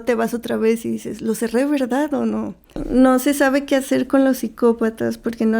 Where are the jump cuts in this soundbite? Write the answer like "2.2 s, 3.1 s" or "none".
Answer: 2.8 s